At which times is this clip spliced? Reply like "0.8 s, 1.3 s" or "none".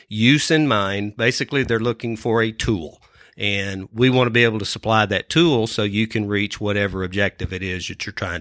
none

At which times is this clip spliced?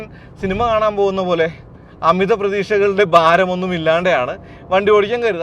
none

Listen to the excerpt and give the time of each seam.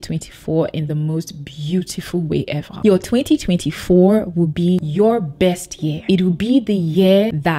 2.7 s

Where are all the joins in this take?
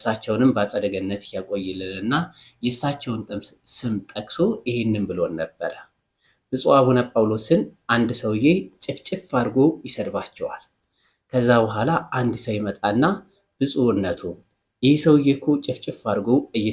none

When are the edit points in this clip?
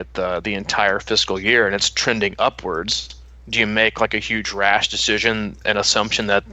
5.6 s

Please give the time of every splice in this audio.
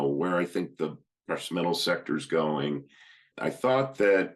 3.3 s

